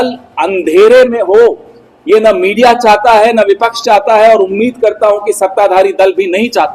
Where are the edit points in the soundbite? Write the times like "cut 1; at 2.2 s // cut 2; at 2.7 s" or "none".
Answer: none